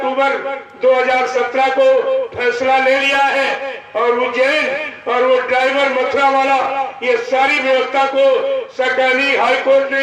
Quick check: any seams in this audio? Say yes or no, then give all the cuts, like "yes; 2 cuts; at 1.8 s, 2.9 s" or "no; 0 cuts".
no; 0 cuts